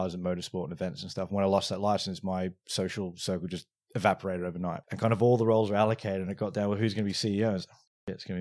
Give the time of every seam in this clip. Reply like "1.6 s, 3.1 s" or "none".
4.8 s